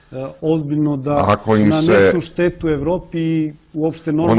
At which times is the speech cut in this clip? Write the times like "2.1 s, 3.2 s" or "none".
2.9 s